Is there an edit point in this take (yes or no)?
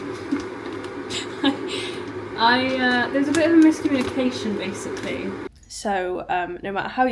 yes